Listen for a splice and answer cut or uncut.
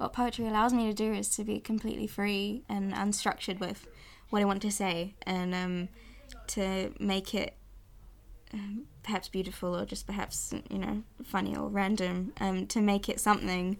cut